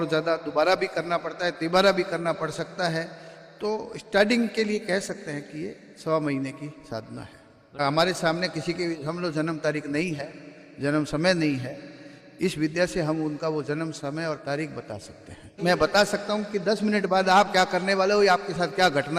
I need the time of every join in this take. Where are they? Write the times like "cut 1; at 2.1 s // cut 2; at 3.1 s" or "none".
cut 1; at 7.8 s // cut 2; at 15.6 s

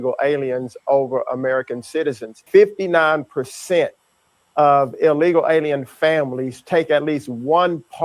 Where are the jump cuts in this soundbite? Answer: cut 1; at 2.3 s

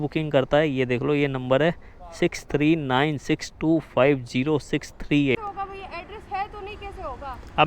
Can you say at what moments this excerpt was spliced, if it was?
cut 1; at 5.4 s

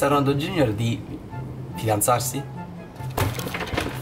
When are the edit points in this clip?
none

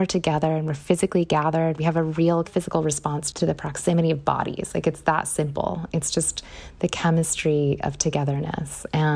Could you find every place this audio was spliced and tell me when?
cut 1; at 1.8 s // cut 2; at 2.8 s

